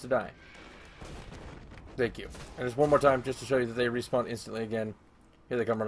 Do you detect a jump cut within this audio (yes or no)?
no